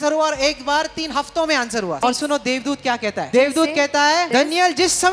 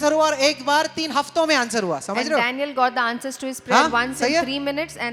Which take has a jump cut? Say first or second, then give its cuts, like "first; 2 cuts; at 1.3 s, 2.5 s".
first; 3 cuts; at 2.0 s, 3.3 s, 4.3 s